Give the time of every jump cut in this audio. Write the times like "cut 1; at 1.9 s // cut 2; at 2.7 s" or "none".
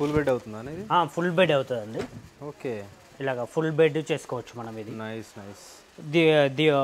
none